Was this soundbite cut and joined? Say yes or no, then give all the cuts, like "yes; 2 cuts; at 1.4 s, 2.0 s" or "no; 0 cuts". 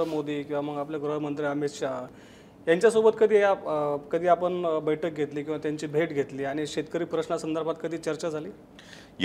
yes; 1 cut; at 2.1 s